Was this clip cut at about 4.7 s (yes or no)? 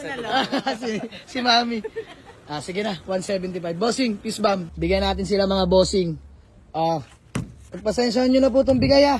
yes